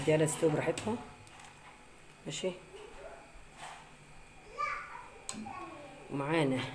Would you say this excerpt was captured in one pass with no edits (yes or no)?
yes